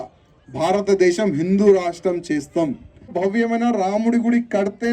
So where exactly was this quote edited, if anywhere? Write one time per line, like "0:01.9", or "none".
0:03.1